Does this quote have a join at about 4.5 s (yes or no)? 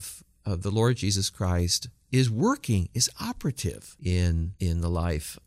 yes